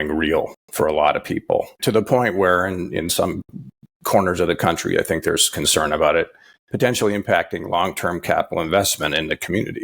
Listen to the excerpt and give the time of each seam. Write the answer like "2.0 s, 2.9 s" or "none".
1.7 s